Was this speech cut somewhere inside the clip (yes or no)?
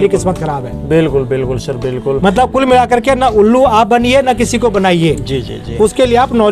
no